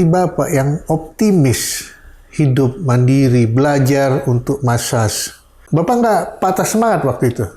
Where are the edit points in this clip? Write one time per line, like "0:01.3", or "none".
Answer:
0:05.6